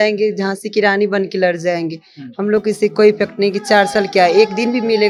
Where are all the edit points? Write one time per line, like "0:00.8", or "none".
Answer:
none